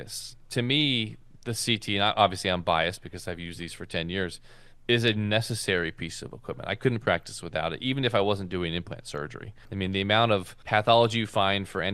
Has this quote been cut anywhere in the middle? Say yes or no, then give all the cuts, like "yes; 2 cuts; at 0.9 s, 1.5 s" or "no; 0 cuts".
no; 0 cuts